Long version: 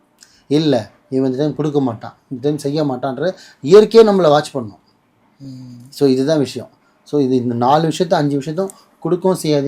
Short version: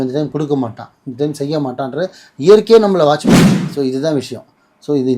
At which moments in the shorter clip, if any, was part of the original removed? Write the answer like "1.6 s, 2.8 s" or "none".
3.6 s

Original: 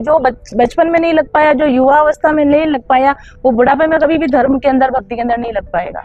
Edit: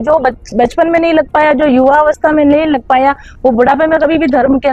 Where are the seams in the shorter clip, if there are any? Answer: none

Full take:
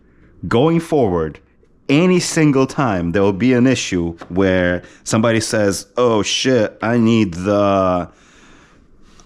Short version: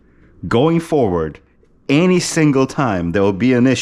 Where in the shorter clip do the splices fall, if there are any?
none

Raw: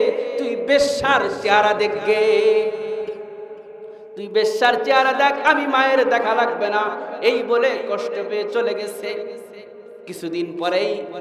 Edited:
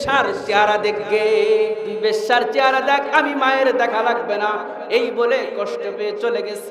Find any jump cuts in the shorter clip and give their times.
1.9 s

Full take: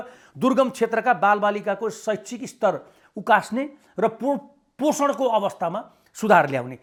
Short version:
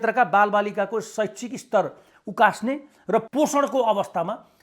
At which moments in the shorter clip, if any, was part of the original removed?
3.3 s

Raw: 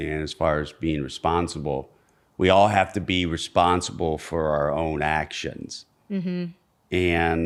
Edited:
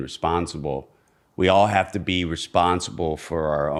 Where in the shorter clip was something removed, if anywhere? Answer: none

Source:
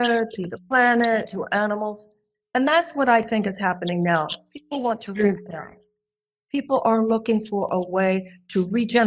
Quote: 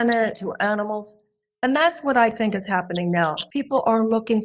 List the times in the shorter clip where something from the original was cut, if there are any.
3.4 s

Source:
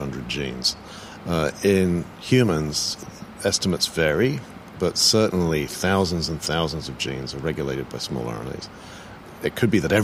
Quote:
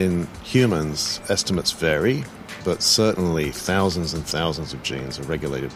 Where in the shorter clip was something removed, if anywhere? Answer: 1.1 s

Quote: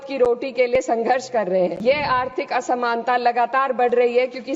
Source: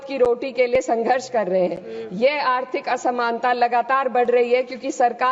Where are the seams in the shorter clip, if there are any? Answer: 1.8 s

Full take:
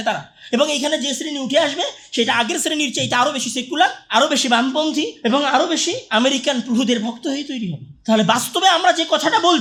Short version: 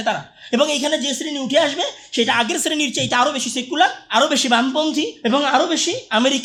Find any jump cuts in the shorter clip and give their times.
none

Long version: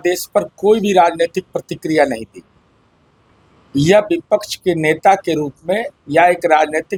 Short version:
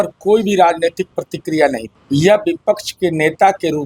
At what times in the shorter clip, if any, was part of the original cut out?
1.9 s

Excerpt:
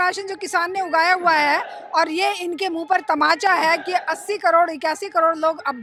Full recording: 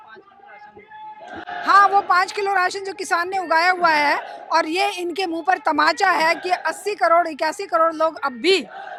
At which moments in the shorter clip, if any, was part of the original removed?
none

